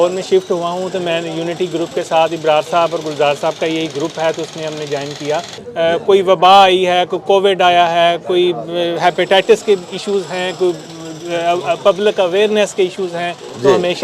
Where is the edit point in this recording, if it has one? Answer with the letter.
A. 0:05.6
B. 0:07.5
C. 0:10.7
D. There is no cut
A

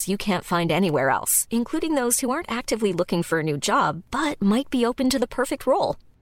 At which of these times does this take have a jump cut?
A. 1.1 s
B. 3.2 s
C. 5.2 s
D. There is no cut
D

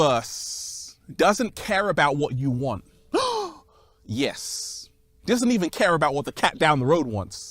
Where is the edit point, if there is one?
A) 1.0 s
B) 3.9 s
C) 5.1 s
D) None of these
C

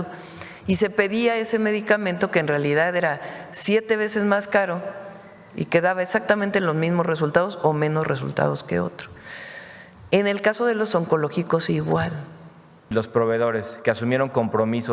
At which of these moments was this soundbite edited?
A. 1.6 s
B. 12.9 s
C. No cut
B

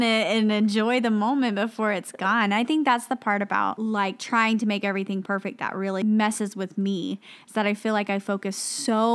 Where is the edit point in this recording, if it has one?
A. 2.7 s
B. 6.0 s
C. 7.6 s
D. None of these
B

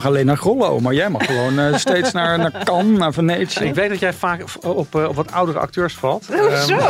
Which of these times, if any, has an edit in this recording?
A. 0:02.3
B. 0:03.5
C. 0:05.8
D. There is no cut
B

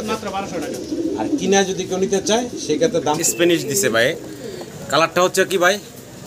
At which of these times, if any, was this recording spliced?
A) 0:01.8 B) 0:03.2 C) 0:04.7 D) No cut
B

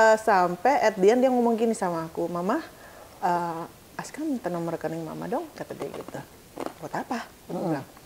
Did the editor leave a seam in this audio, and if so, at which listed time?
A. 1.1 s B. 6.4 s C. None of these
C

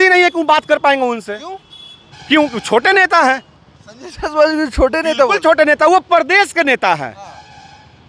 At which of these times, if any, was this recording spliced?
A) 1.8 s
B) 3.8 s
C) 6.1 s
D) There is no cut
D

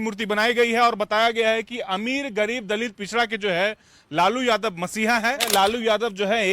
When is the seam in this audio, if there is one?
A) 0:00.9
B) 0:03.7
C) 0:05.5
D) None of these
C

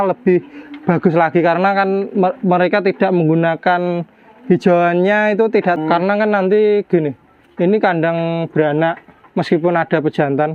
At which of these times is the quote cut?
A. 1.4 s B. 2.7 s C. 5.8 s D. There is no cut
C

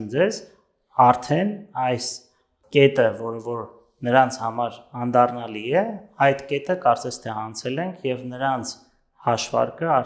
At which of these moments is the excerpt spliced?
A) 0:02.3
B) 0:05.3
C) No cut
C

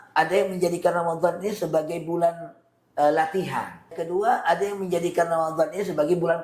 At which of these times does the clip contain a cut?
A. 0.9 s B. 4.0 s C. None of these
B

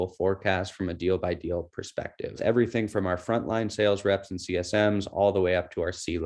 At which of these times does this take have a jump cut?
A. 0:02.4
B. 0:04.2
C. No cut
A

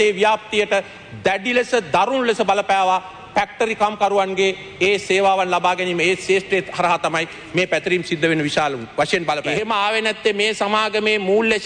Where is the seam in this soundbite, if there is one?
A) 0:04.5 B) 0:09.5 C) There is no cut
B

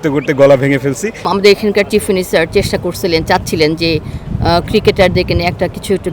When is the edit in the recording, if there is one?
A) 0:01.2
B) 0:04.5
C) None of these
A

